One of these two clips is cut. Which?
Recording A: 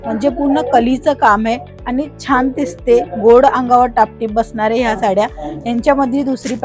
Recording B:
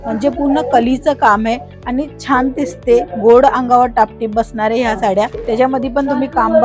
B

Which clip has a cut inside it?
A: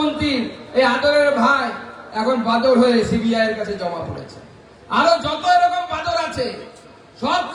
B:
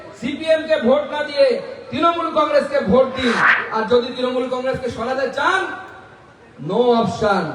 B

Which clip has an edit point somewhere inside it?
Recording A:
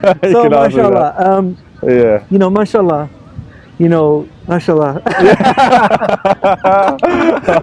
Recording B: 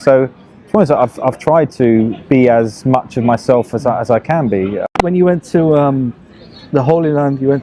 B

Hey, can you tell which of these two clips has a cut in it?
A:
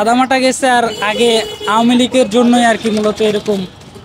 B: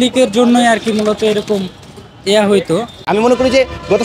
B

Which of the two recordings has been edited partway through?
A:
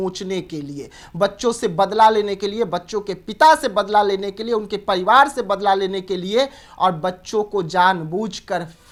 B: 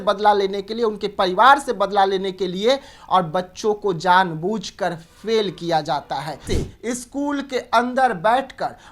B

